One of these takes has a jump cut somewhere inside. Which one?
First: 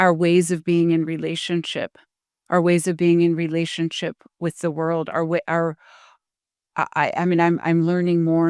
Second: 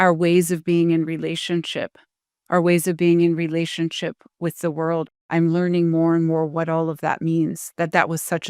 second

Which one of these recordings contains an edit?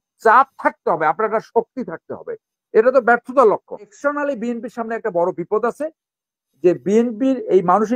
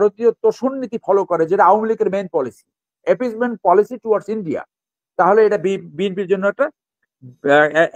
first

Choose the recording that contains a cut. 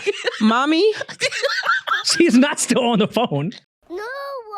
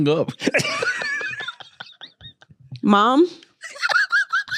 first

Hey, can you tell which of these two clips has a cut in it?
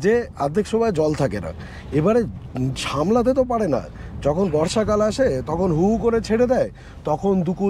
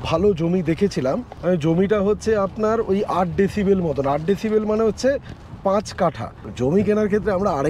second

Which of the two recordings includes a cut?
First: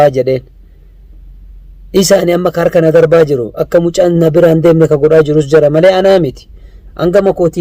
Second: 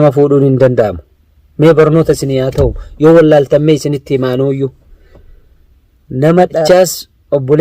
second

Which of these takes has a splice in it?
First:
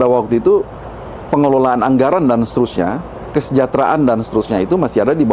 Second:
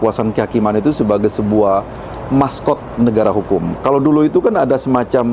second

